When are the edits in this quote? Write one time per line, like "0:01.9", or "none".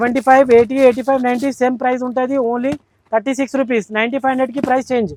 none